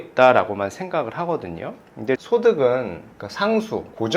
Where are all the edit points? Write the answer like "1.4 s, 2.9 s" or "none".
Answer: 2.2 s